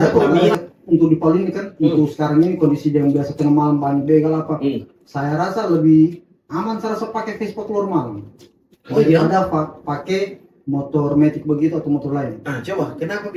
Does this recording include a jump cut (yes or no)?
no